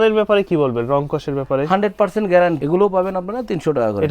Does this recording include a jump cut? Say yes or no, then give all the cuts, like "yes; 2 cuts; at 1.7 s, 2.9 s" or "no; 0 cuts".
yes; 1 cut; at 2.6 s